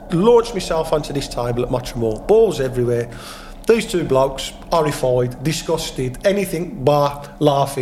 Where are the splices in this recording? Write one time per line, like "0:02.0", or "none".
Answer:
none